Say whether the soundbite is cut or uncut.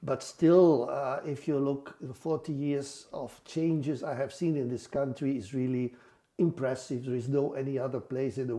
uncut